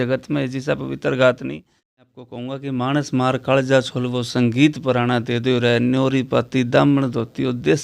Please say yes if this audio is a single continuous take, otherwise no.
no